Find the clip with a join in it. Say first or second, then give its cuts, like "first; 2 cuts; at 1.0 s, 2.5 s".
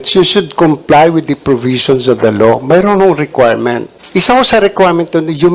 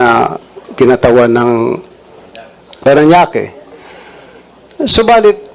first; 1 cut; at 3.9 s